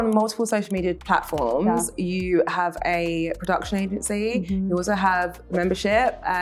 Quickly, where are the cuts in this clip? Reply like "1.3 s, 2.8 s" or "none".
none